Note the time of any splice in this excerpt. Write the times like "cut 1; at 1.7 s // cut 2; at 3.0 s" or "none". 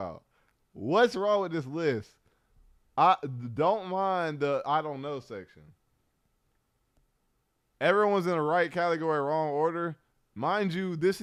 none